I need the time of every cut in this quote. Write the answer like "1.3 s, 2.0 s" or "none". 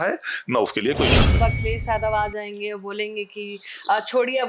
1.4 s